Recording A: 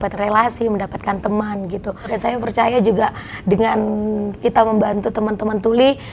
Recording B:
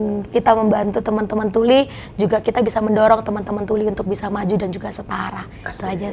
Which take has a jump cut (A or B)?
A